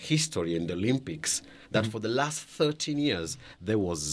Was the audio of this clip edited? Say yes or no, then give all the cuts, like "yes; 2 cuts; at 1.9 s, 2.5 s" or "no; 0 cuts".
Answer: no; 0 cuts